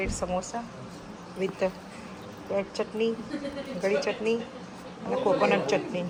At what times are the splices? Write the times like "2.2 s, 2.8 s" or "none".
none